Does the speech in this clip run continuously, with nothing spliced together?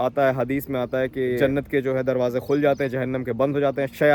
yes; 0 cuts

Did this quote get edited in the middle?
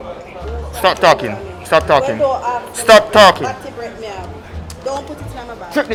no; 0 cuts

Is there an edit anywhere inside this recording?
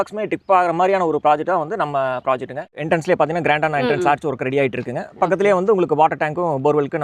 yes; 1 cut; at 2.8 s

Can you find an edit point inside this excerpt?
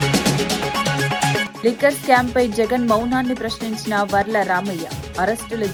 no; 0 cuts

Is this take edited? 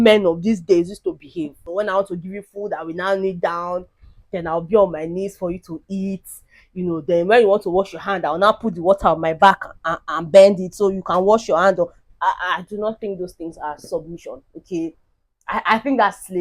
yes; 1 cut; at 1.6 s

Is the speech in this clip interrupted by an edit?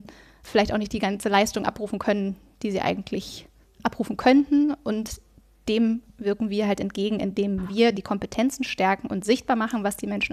no; 0 cuts

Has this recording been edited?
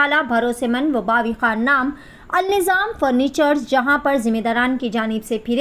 no; 0 cuts

